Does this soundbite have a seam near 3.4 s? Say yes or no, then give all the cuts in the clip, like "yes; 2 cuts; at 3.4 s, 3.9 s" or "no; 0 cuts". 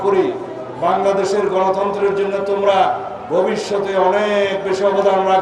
no; 0 cuts